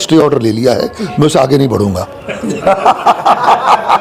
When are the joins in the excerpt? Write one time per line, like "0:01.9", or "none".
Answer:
none